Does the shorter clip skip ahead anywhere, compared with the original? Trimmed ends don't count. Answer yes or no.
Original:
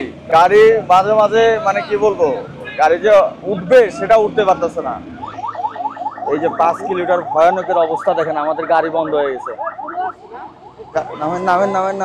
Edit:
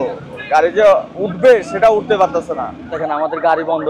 yes